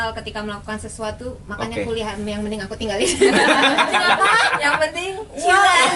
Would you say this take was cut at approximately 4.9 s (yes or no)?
no